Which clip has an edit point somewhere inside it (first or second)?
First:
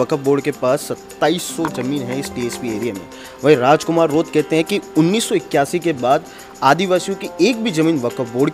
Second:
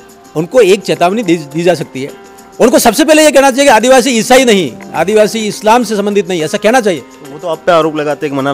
second